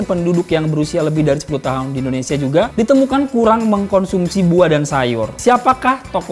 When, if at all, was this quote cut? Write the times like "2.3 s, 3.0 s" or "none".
2.7 s, 5.3 s

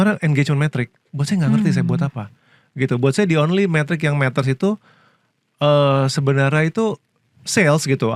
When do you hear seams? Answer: none

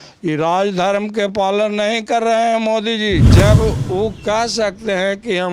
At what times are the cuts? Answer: 3.3 s

